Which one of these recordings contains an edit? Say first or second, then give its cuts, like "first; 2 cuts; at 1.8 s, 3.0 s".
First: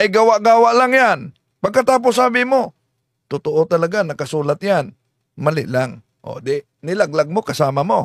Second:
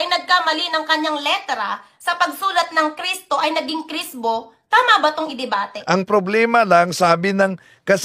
second; 1 cut; at 5.7 s